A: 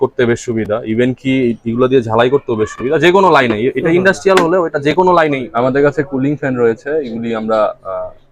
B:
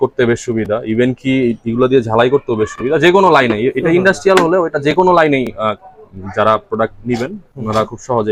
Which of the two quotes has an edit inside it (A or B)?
A